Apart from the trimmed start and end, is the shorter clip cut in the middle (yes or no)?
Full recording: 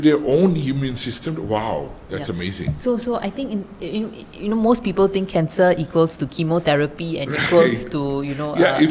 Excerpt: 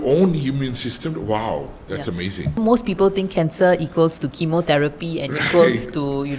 yes